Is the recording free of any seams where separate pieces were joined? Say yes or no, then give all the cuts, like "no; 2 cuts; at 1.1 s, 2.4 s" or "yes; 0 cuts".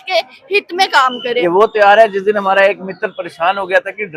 no; 1 cut; at 1.4 s